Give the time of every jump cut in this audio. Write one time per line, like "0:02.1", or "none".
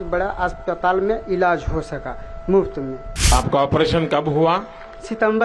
0:03.3